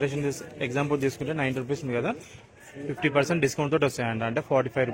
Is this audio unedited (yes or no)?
yes